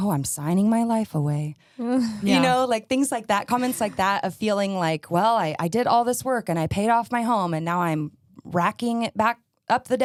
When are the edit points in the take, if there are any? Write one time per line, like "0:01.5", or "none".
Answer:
none